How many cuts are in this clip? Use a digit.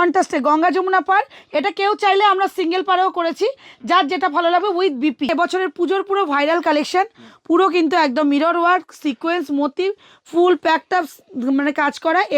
1